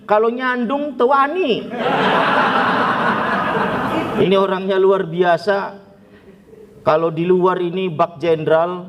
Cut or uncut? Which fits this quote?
cut